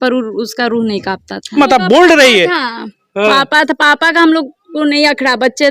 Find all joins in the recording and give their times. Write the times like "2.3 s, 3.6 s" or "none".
1.6 s